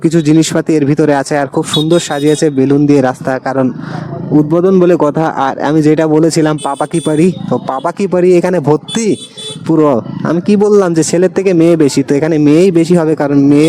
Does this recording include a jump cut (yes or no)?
no